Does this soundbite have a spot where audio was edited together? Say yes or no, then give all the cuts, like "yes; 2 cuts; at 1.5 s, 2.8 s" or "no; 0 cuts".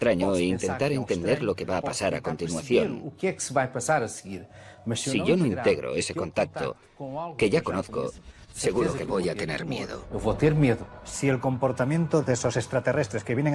yes; 1 cut; at 8.3 s